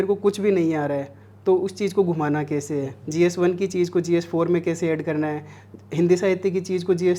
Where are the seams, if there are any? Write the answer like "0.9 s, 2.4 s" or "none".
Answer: none